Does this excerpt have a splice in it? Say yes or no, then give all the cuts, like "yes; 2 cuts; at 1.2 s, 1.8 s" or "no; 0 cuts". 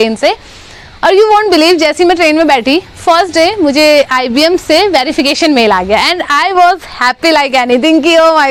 no; 0 cuts